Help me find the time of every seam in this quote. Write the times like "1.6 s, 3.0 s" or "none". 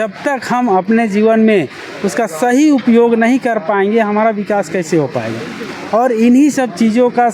none